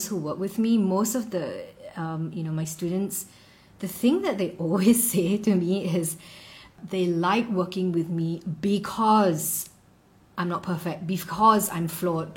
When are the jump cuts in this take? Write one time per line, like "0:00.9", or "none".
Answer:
0:06.7